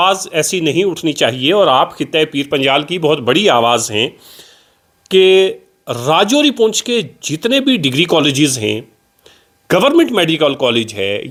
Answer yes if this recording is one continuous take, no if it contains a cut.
yes